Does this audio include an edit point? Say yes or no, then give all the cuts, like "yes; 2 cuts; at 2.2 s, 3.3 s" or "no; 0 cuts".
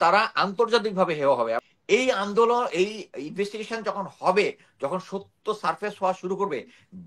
yes; 1 cut; at 1.7 s